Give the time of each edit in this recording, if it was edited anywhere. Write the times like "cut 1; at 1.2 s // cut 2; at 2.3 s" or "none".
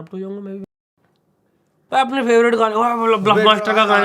cut 1; at 1.8 s